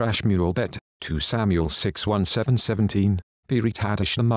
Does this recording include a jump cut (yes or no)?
yes